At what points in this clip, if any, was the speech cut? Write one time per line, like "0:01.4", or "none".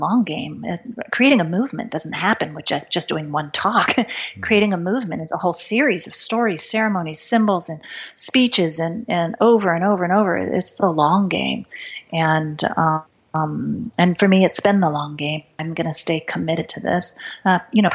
0:13.2
0:15.5